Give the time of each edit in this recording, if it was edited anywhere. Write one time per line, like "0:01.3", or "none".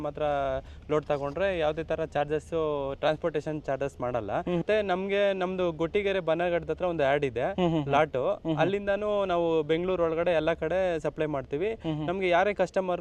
0:04.6